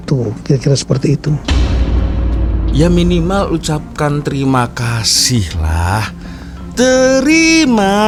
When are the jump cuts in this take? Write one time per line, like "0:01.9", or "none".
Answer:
none